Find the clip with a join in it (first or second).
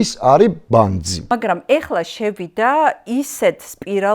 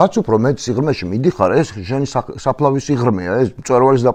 first